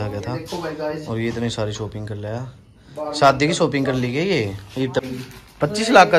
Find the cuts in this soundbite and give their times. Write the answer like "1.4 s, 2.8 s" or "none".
5.0 s